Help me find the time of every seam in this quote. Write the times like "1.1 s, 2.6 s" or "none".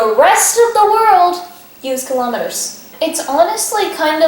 2.8 s